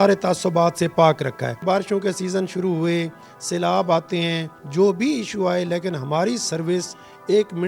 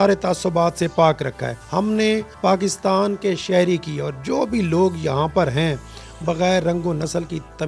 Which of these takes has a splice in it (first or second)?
first